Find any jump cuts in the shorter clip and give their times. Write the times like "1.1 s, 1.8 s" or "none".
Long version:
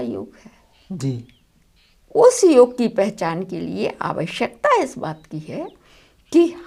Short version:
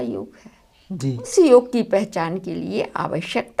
1.3 s